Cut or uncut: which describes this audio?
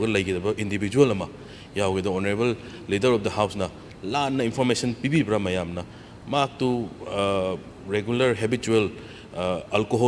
uncut